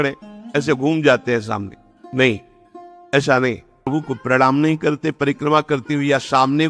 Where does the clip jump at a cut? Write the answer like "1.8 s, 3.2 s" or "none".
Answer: 3.9 s